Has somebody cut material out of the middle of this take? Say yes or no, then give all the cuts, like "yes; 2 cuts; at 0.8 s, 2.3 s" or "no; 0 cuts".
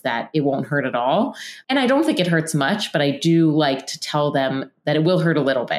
yes; 1 cut; at 1.5 s